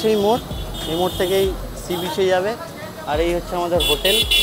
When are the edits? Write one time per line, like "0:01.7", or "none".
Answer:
none